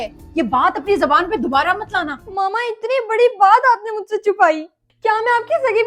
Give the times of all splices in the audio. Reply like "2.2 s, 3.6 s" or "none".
2.2 s